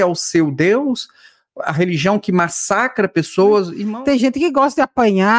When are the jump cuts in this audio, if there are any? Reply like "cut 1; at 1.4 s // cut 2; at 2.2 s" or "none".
cut 1; at 3.8 s